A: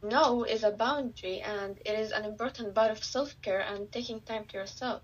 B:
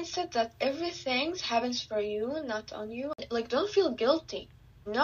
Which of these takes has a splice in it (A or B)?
B